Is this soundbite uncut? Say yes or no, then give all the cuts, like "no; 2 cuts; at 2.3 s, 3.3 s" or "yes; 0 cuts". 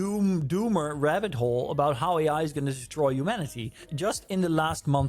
no; 1 cut; at 3.9 s